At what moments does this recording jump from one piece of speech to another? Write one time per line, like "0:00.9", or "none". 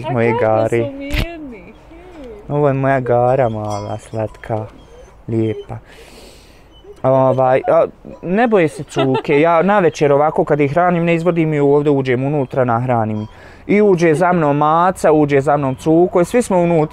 none